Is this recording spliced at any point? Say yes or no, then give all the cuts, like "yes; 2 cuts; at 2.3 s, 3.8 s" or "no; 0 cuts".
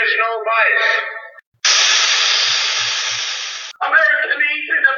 yes; 2 cuts; at 1.4 s, 3.2 s